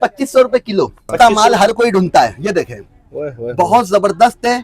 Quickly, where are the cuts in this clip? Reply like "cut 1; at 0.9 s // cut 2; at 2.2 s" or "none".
cut 1; at 1.1 s